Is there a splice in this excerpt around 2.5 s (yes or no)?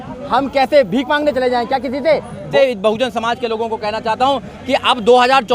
yes